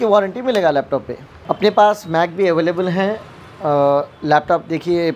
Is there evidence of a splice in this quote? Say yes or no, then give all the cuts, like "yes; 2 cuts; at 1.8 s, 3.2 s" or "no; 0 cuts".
no; 0 cuts